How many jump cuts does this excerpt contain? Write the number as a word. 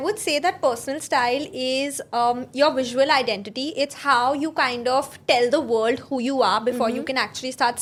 zero